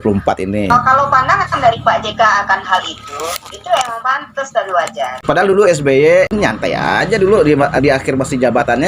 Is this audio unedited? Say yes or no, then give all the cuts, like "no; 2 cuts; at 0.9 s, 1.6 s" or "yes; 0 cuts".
no; 2 cuts; at 0.7 s, 5.2 s